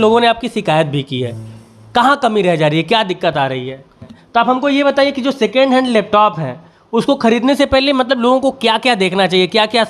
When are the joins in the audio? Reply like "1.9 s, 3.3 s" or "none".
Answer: 4.2 s